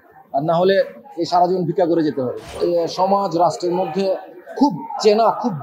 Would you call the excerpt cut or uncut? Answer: cut